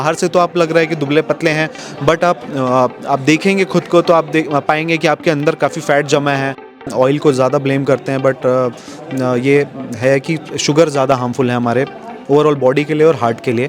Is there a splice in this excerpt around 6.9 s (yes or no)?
yes